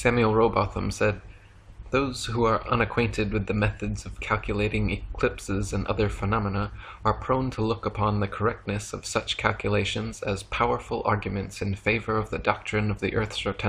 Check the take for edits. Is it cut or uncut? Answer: cut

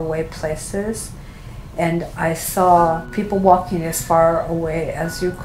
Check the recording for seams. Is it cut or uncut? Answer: cut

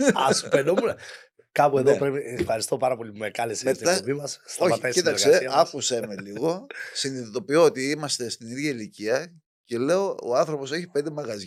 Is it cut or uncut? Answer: uncut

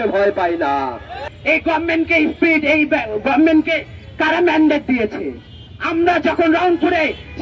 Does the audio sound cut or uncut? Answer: uncut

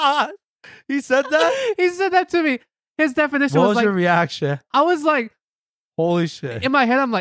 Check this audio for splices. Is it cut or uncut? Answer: uncut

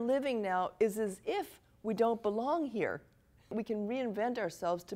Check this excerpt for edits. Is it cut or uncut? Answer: cut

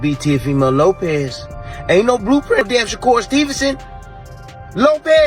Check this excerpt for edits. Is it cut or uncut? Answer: cut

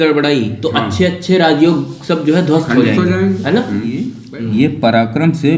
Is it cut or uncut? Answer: cut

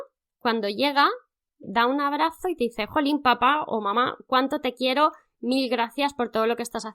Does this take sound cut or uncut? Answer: cut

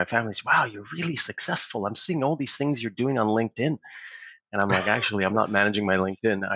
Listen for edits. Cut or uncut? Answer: uncut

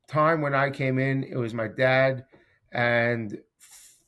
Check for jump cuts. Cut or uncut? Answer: uncut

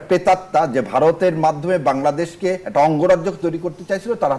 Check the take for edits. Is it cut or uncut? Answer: uncut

